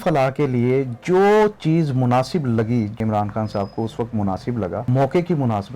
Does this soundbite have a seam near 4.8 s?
yes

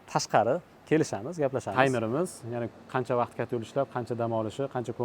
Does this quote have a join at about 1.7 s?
yes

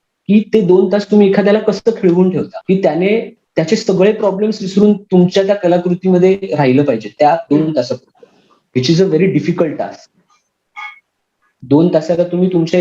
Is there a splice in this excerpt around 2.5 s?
yes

